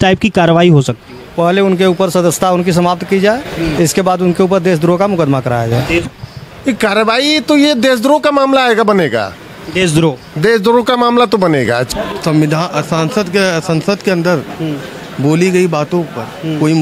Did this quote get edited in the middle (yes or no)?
yes